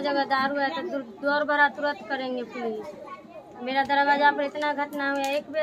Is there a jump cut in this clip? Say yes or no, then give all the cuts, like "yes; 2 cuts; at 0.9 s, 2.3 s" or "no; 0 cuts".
no; 0 cuts